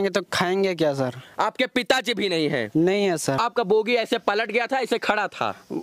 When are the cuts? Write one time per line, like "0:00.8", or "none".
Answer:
0:03.5